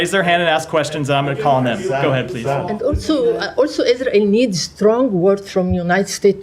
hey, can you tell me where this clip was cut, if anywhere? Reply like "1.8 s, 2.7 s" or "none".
2.8 s